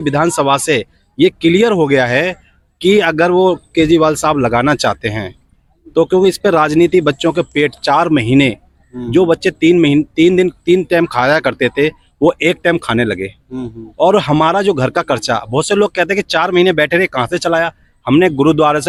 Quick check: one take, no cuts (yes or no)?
yes